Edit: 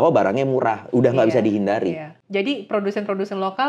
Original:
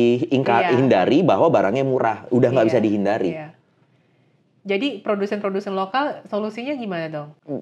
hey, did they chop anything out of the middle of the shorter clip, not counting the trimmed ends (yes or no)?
yes